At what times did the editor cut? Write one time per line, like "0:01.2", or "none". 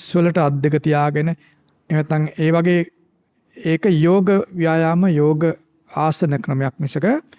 none